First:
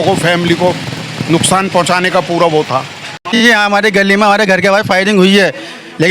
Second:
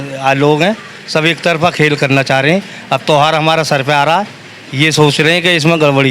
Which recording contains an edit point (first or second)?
first